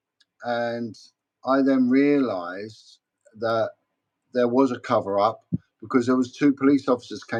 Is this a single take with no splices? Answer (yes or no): yes